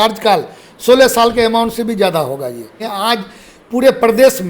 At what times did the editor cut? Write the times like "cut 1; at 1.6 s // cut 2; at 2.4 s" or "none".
cut 1; at 2.8 s